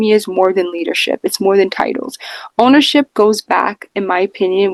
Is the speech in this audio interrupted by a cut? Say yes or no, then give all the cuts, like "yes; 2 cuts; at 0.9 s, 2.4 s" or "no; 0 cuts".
no; 0 cuts